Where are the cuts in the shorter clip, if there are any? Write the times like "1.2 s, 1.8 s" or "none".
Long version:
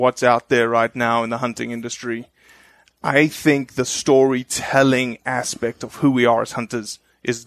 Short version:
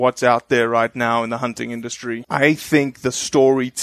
2.2 s